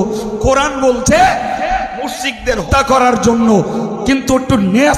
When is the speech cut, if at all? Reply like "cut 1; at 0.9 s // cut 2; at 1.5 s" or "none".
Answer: cut 1; at 2.6 s